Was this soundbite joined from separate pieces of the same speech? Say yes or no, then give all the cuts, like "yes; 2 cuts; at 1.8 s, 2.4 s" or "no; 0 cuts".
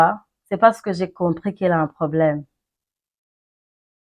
no; 0 cuts